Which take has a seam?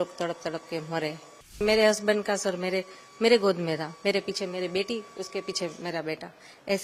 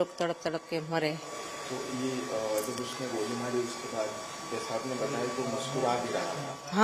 first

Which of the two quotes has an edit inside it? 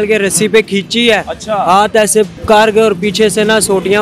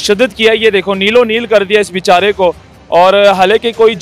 first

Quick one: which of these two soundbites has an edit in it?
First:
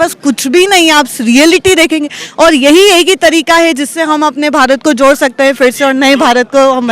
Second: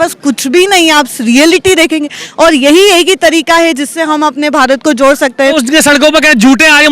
second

